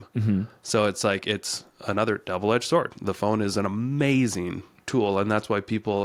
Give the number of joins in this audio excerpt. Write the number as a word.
zero